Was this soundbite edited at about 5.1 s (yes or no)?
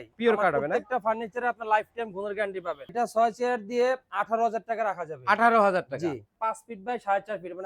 no